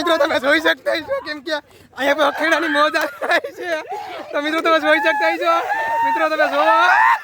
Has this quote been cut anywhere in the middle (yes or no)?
no